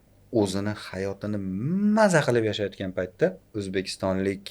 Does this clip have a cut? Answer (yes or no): yes